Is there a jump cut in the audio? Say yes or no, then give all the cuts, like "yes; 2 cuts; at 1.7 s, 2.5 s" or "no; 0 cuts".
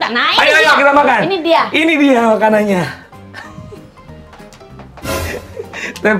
no; 0 cuts